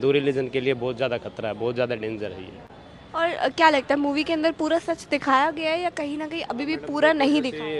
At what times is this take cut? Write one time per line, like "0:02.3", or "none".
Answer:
none